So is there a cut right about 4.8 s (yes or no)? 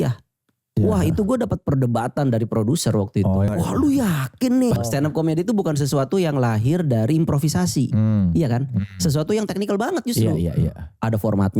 yes